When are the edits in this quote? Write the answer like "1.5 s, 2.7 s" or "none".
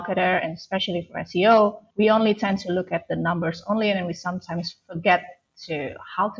1.8 s